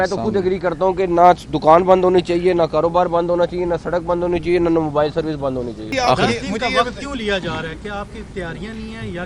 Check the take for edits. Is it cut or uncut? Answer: cut